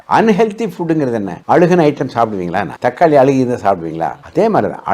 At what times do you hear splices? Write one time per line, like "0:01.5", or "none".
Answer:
0:01.3
0:02.7